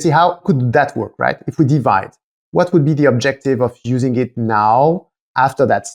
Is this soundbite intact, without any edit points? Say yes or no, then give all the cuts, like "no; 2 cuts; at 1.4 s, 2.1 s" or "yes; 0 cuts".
yes; 0 cuts